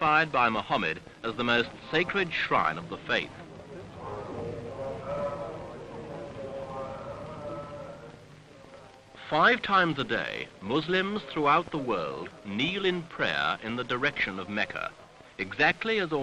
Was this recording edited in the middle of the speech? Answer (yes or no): yes